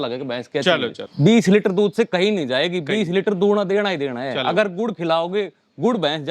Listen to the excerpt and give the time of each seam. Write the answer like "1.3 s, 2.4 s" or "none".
1.0 s